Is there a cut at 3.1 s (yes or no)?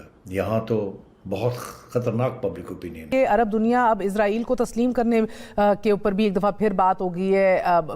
yes